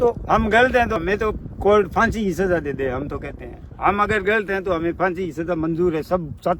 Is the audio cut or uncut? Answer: cut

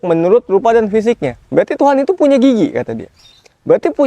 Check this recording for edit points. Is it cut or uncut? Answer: uncut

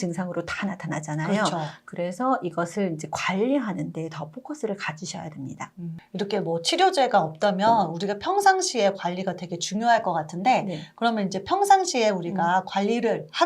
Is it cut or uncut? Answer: cut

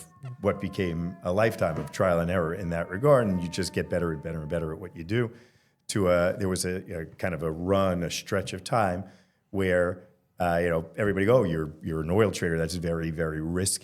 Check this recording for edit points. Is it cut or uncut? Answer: uncut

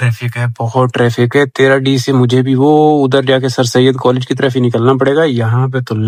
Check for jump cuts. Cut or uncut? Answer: uncut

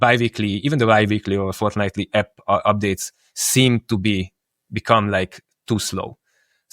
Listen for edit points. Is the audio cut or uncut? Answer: uncut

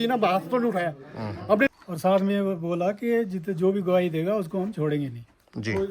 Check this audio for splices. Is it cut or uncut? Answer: cut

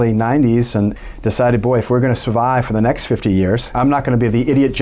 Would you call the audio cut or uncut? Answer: cut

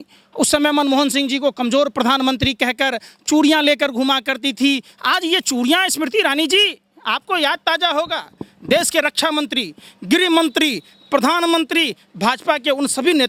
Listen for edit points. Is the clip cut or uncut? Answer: uncut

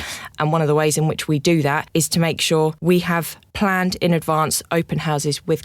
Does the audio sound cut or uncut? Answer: cut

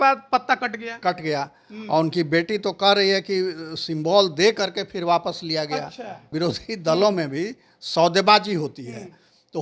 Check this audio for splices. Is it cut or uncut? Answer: cut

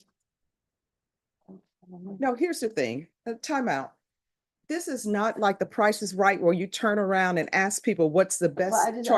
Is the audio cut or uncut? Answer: uncut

